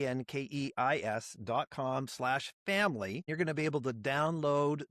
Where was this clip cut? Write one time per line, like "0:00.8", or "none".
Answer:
0:03.3